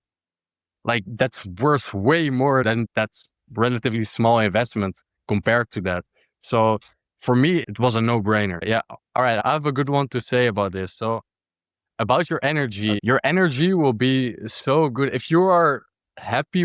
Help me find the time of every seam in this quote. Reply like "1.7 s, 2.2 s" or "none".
2.9 s, 7.6 s, 8.6 s